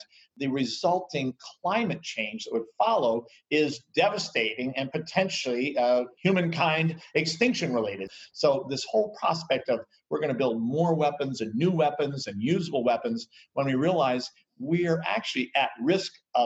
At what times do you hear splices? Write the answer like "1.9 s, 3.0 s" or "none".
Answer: 6.1 s, 8.1 s